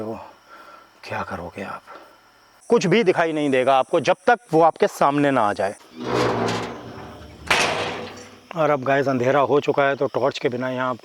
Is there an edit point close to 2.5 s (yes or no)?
yes